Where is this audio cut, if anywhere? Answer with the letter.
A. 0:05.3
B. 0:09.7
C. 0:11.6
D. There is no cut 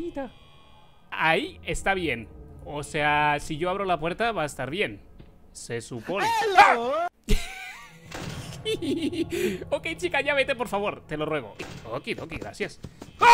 C